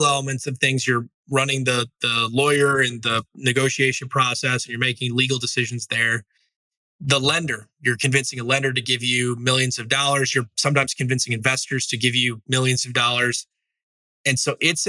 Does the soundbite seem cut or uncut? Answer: cut